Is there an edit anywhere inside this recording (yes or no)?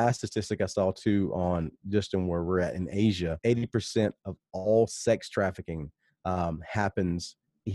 yes